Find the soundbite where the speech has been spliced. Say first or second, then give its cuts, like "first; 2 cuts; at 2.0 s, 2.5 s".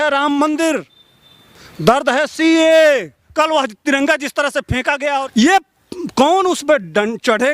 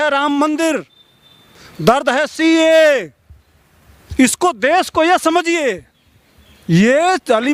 first; 2 cuts; at 3.2 s, 5.2 s